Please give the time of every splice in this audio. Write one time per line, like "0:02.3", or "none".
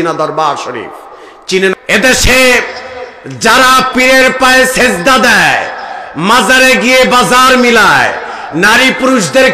0:01.7